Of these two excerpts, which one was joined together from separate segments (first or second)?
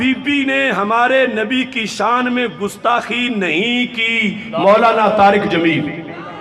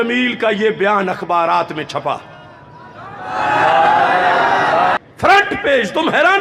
second